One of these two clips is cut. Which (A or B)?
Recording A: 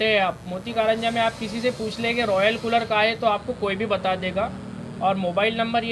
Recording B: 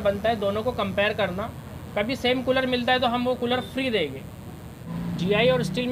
B